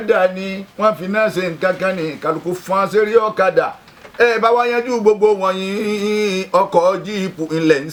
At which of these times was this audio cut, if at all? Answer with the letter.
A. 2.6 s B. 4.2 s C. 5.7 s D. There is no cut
D